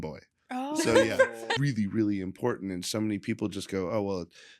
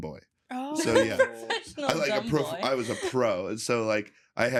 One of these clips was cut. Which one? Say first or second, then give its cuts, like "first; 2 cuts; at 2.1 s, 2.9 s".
first; 1 cut; at 1.5 s